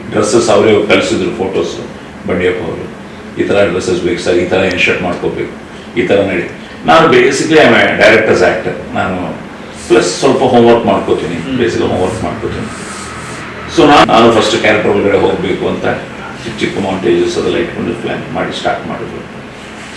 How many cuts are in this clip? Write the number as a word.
one